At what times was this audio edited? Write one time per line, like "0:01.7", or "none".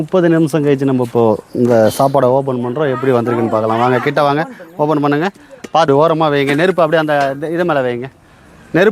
0:05.9